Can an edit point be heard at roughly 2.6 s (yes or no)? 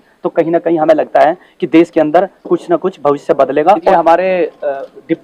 no